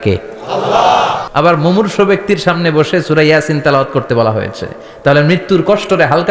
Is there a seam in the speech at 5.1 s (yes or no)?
no